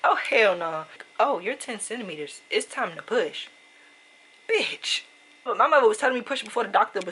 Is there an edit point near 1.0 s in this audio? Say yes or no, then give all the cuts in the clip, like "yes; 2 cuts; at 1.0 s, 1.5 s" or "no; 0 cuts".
yes; 2 cuts; at 1.0 s, 5.5 s